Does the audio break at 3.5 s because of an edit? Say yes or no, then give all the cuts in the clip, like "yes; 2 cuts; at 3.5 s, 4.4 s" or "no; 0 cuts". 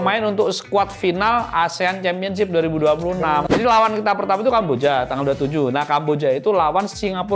yes; 1 cut; at 3.5 s